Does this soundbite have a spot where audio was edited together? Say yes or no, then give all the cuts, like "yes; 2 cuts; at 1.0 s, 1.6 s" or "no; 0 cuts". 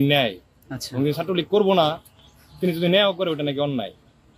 no; 0 cuts